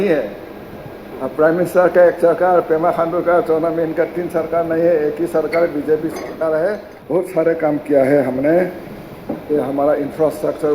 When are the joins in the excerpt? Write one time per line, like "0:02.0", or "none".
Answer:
0:06.9